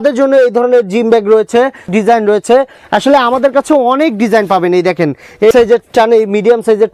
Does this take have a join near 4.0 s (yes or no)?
no